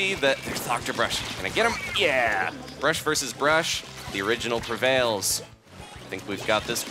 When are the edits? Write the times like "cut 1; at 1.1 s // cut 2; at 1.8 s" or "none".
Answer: cut 1; at 5.6 s

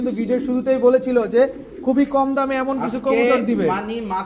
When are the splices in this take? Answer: none

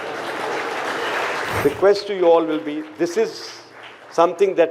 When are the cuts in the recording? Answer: cut 1; at 1.5 s

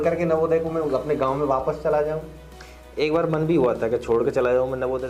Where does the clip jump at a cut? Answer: none

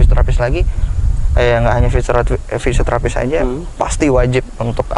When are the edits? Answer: none

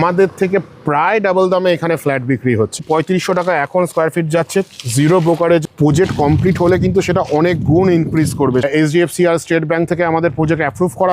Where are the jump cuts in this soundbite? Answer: cut 1; at 2.8 s // cut 2; at 5.6 s // cut 3; at 8.6 s

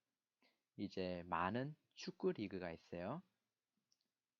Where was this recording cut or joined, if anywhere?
none

